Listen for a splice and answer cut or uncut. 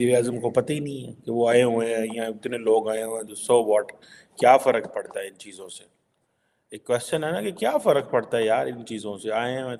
uncut